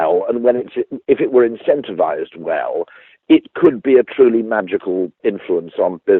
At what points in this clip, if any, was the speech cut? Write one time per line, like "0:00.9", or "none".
0:05.2